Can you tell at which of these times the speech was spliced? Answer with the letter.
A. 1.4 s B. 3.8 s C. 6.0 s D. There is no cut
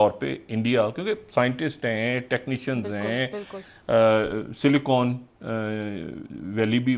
D